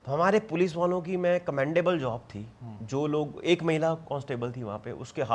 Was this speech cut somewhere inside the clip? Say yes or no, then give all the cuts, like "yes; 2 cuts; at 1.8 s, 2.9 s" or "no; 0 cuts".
no; 0 cuts